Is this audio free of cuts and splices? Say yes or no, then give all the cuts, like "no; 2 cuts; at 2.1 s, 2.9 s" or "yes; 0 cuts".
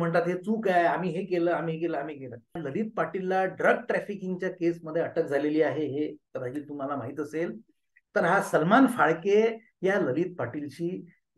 no; 1 cut; at 2.5 s